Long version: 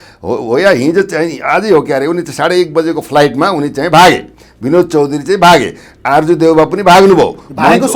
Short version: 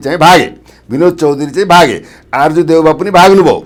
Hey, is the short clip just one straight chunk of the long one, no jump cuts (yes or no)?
yes